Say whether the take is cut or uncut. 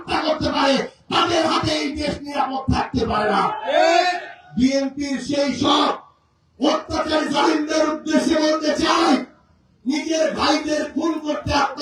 uncut